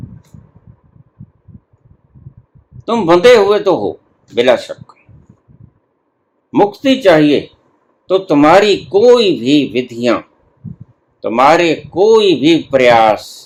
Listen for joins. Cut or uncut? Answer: uncut